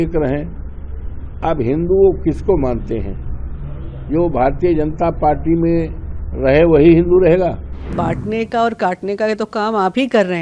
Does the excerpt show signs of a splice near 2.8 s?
no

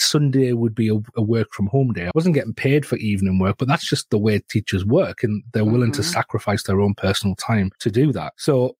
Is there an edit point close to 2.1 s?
yes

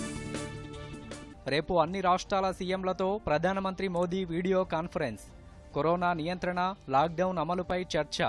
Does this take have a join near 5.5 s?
no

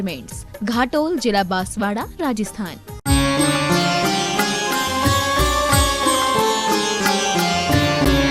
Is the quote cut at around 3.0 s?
yes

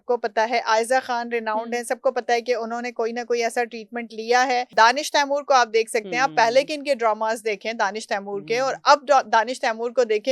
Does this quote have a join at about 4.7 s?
yes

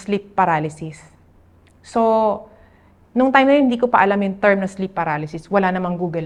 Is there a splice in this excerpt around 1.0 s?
no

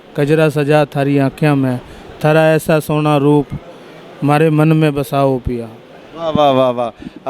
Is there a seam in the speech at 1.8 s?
no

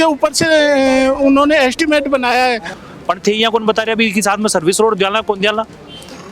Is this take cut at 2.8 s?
yes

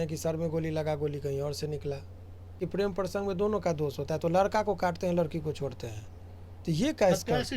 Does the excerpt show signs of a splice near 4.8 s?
no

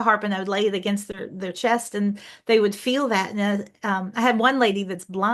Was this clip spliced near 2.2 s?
no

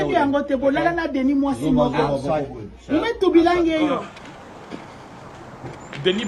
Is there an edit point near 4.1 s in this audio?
yes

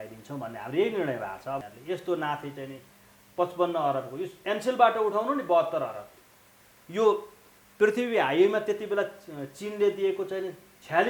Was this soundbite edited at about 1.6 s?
yes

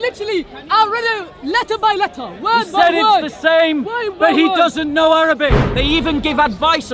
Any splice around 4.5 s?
no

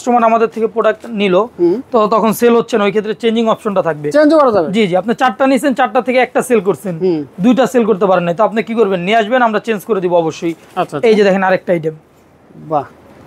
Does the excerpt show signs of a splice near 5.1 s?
no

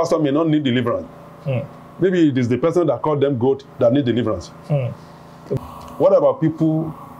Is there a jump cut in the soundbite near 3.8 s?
no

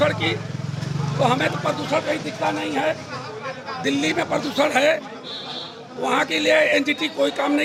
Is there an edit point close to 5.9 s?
no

